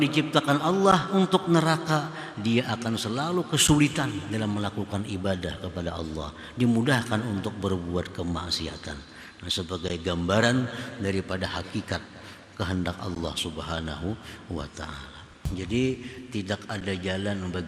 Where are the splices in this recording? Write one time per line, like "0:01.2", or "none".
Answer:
0:15.3